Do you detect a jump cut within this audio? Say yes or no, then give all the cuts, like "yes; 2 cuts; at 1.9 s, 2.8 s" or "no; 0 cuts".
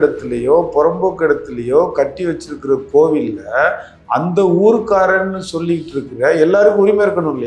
no; 0 cuts